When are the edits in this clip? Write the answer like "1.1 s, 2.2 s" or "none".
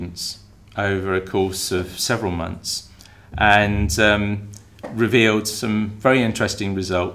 none